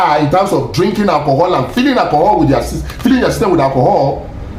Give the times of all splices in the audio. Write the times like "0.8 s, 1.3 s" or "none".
none